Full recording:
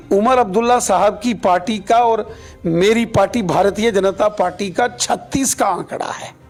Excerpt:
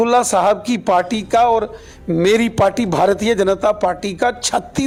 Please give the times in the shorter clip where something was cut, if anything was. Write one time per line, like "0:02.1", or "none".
none